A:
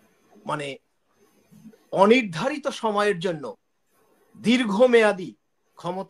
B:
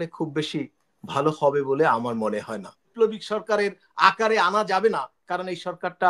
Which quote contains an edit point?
B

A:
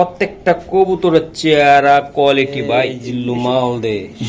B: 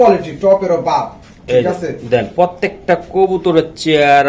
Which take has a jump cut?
A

